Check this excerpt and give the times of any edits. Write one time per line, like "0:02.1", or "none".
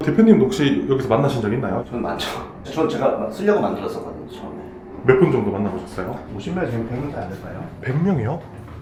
none